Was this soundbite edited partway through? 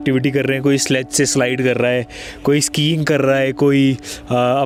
no; 0 cuts

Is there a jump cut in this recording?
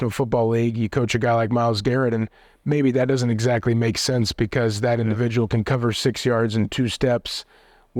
no; 0 cuts

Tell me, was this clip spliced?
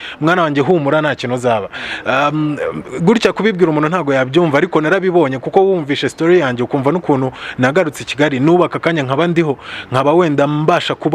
no; 0 cuts

